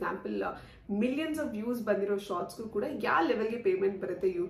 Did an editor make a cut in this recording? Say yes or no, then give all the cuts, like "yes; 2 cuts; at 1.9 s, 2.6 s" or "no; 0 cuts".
no; 0 cuts